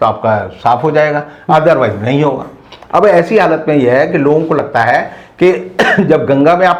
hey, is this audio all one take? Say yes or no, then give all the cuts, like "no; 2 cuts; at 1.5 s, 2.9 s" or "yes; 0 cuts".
yes; 0 cuts